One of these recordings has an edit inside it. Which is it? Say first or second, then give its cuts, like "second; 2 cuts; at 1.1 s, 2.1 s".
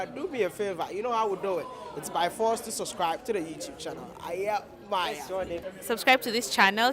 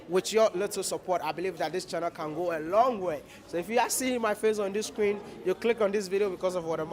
first; 1 cut; at 5.6 s